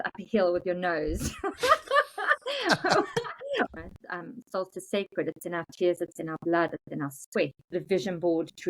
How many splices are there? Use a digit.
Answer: 2